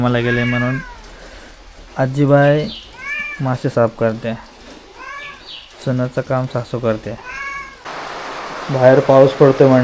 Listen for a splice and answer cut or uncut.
cut